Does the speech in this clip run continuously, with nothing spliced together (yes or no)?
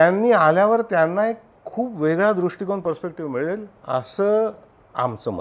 yes